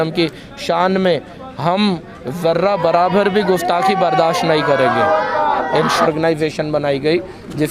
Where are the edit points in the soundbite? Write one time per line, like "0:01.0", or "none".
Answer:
0:06.0